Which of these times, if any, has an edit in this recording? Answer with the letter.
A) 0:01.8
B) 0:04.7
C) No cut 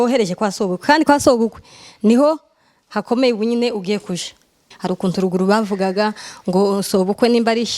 B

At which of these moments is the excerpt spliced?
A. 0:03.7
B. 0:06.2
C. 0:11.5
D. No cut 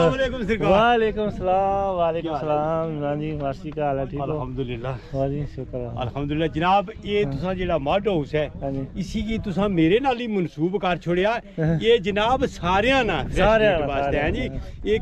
D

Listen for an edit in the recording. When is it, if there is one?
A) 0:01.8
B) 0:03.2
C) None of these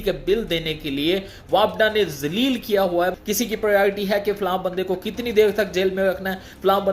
B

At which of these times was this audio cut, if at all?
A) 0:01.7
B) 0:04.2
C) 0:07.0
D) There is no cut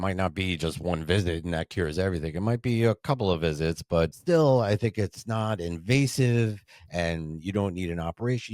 B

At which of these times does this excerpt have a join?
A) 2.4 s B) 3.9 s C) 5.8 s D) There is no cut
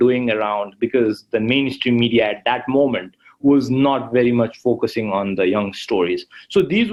D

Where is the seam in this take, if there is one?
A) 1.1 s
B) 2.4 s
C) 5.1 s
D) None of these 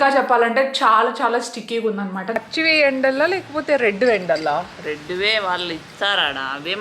B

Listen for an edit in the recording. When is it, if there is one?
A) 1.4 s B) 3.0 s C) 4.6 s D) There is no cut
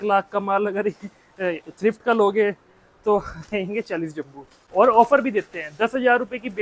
C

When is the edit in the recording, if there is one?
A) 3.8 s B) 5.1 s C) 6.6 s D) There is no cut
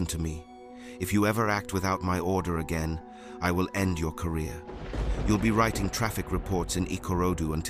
D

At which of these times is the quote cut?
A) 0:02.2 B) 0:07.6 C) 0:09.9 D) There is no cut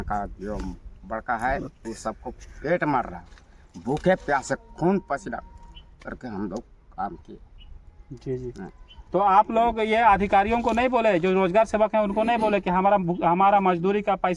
D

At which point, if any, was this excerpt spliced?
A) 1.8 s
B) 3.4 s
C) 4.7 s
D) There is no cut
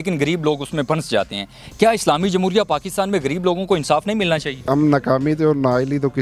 C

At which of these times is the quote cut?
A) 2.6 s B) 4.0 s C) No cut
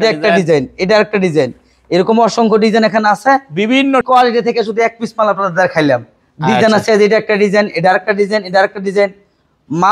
B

